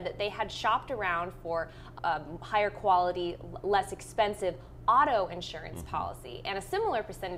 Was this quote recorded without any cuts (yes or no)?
no